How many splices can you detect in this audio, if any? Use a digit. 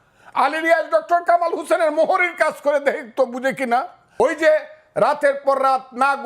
1